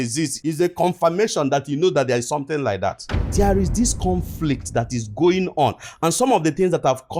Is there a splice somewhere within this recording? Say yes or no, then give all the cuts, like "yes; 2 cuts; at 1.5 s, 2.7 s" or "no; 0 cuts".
no; 0 cuts